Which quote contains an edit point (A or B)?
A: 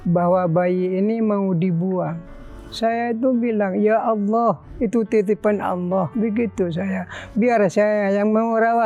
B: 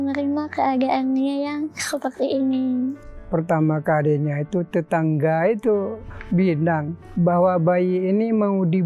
B